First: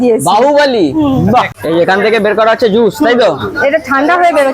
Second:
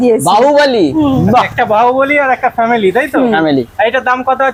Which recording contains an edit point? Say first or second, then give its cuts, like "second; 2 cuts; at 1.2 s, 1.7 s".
first; 1 cut; at 1.5 s